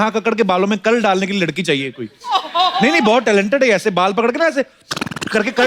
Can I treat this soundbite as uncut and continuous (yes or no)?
yes